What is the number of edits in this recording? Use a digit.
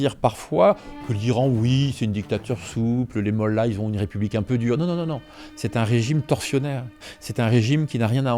0